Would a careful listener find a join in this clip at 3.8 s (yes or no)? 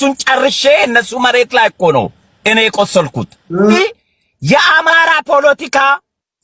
yes